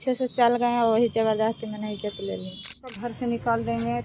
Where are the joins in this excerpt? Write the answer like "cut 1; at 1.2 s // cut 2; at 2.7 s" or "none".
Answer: cut 1; at 3.0 s